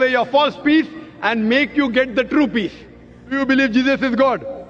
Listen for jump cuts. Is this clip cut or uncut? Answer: cut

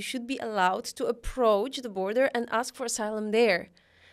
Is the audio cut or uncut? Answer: uncut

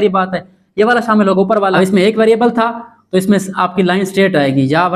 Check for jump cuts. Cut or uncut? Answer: cut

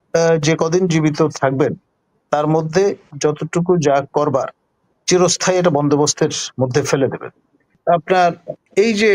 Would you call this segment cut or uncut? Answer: cut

